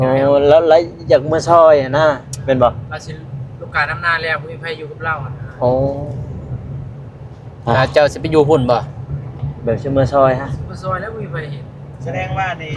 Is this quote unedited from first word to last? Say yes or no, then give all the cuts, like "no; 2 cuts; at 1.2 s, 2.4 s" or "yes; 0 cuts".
yes; 0 cuts